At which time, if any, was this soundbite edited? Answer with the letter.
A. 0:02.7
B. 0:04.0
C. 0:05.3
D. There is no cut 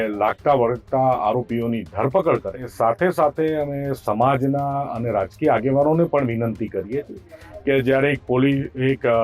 A